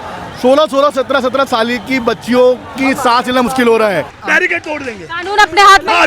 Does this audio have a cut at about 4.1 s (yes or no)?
yes